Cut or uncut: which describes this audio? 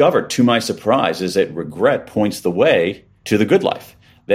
cut